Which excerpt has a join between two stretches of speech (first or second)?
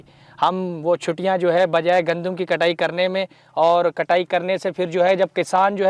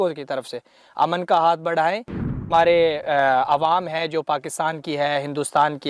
second